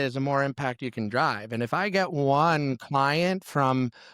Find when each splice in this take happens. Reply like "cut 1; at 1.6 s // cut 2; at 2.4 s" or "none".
none